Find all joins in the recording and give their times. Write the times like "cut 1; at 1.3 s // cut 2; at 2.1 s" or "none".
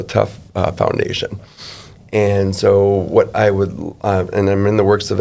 none